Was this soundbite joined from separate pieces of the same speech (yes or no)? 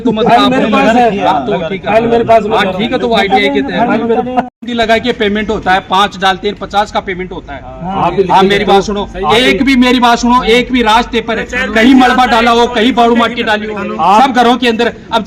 no